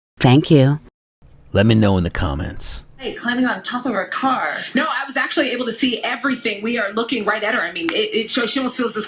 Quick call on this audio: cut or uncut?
cut